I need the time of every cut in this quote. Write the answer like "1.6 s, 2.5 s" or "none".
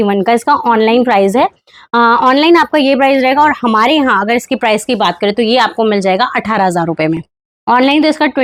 none